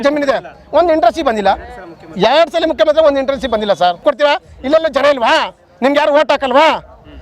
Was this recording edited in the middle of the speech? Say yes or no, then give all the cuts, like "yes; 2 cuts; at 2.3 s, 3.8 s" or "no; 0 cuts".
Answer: yes; 1 cut; at 4.0 s